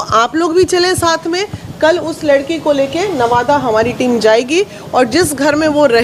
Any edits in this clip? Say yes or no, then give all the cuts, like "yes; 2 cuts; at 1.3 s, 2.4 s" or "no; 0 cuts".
no; 0 cuts